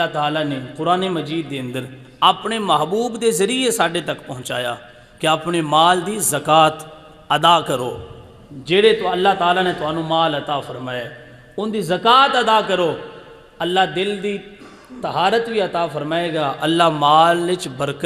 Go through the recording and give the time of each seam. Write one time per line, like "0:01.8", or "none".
none